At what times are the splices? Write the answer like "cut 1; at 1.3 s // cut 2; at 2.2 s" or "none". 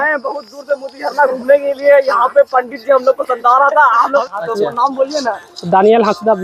cut 1; at 4.2 s